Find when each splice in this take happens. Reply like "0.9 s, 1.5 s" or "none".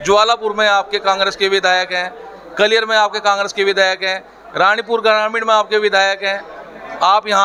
none